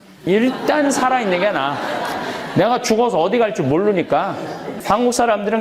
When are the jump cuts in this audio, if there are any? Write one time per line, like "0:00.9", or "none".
0:04.7